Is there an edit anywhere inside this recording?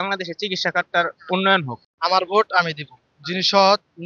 yes; 1 cut; at 1.8 s

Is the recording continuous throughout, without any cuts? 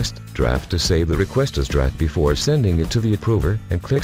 yes; 0 cuts

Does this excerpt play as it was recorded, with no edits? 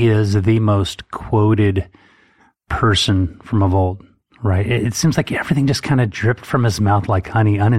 yes; 0 cuts

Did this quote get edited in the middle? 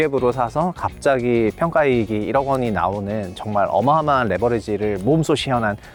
no; 0 cuts

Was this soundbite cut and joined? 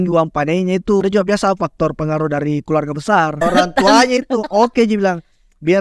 yes; 2 cuts; at 1.0 s, 3.4 s

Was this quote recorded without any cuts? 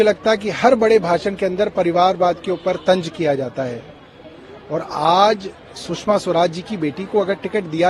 yes; 0 cuts

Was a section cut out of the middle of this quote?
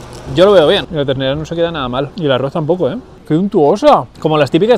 yes; 2 cuts; at 0.9 s, 3.1 s

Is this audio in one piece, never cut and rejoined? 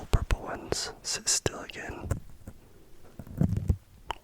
yes; 0 cuts

